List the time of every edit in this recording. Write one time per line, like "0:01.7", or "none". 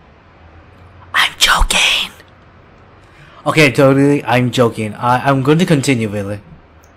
none

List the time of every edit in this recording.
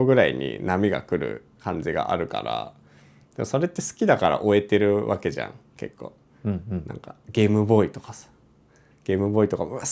none

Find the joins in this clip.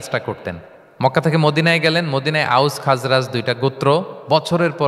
none

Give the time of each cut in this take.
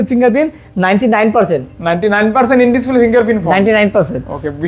none

